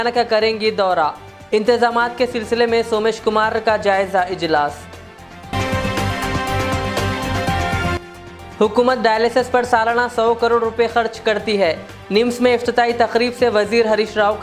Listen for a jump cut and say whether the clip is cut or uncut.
uncut